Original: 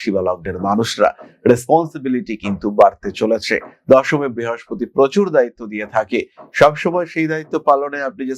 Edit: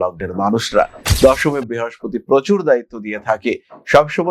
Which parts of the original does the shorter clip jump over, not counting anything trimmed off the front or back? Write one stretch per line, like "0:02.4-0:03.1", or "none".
0:01.3-0:03.7